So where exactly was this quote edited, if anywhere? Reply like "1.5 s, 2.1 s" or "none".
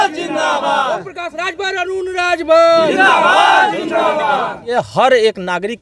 4.7 s